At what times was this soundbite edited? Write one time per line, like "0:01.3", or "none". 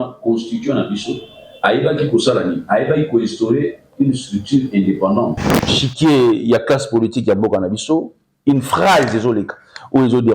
0:05.8